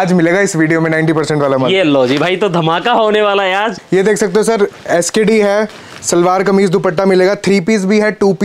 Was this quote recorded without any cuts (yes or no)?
yes